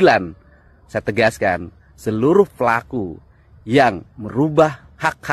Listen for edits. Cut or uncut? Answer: uncut